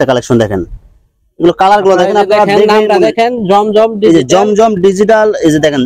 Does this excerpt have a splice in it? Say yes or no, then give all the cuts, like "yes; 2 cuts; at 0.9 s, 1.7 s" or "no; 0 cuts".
no; 0 cuts